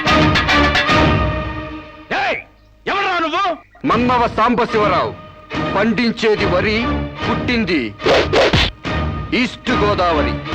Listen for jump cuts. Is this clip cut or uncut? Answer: uncut